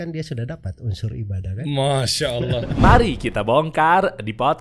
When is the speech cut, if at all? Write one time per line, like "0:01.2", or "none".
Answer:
0:02.7